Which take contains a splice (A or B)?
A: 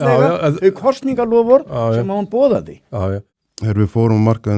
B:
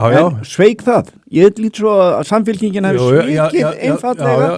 A